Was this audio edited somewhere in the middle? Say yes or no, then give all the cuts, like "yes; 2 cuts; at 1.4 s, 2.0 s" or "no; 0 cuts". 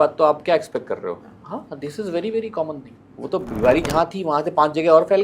yes; 1 cut; at 2.9 s